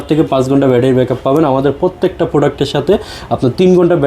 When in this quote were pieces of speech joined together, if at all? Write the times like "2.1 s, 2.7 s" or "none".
none